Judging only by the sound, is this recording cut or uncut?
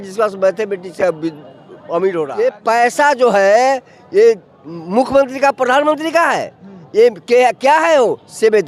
cut